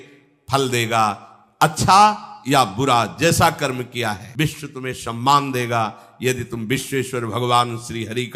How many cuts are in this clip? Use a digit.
1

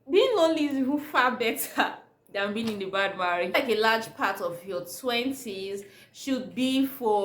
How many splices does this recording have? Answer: 1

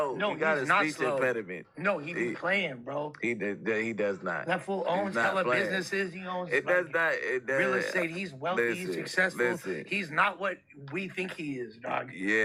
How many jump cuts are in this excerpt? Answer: 0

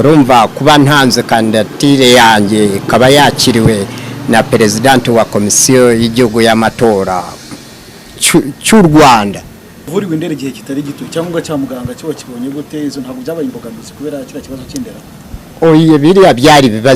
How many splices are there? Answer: 1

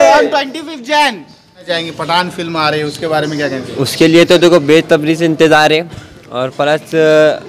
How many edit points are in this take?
1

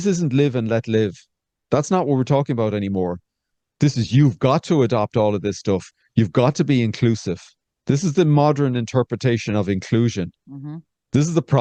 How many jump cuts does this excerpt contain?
0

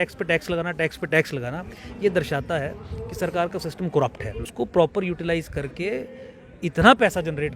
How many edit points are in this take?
1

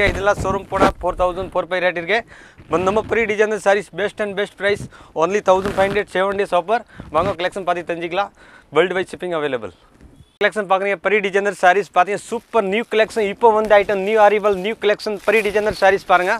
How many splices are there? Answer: 0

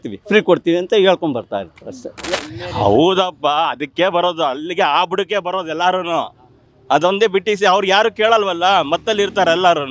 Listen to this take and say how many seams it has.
1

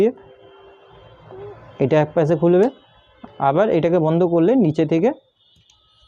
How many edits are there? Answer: 0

